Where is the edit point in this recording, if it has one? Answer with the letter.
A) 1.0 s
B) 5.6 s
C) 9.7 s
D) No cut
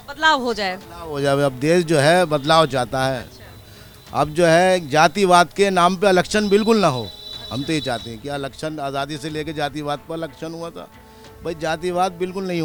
D